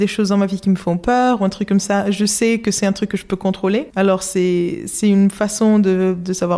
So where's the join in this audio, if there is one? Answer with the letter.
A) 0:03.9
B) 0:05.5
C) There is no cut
A